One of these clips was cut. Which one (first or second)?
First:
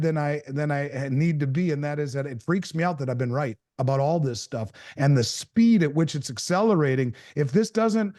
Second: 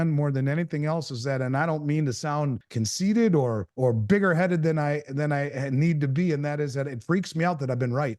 second